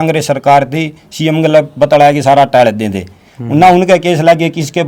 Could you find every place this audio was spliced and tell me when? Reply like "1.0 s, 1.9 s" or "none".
none